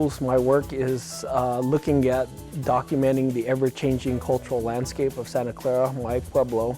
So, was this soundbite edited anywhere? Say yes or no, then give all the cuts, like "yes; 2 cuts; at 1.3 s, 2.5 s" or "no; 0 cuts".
yes; 1 cut; at 2.4 s